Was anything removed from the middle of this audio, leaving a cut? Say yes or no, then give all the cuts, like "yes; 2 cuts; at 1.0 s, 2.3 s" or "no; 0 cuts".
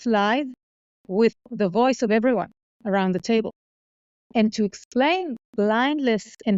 yes; 1 cut; at 1.5 s